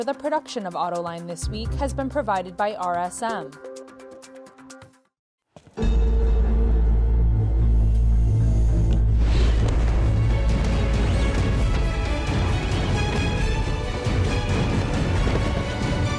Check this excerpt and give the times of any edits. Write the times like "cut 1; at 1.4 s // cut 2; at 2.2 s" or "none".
cut 1; at 3.4 s // cut 2; at 4.9 s